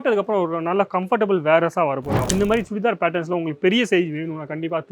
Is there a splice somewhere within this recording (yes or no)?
yes